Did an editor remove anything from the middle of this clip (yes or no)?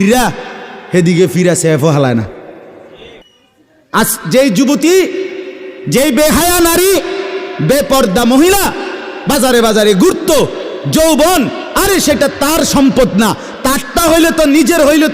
yes